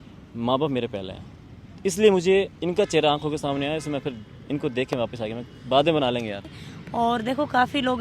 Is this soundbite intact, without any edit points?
no; 1 cut; at 6.4 s

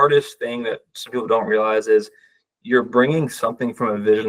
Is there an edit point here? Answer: no; 0 cuts

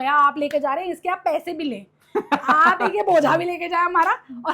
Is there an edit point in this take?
no; 0 cuts

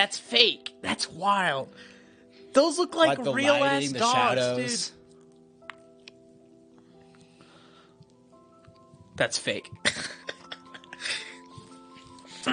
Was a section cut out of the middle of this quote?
no; 0 cuts

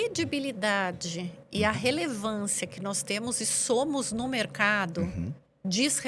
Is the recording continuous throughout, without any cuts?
yes; 0 cuts

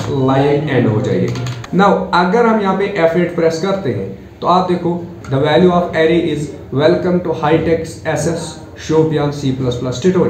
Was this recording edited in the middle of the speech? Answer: yes; 2 cuts; at 1.5 s, 5.2 s

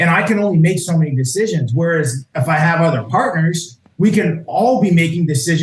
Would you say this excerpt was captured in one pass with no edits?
no; 1 cut; at 2.2 s

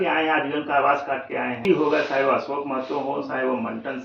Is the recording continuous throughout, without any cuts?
no; 1 cut; at 1.6 s

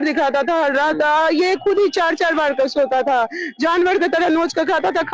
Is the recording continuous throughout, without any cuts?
yes; 0 cuts

